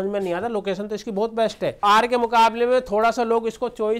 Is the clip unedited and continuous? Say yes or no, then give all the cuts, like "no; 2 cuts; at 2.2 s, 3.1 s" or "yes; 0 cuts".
no; 1 cut; at 1.8 s